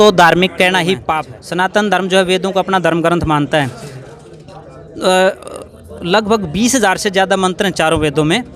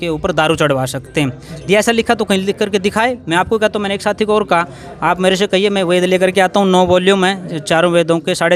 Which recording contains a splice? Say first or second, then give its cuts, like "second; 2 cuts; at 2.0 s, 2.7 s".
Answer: first; 1 cut; at 1.0 s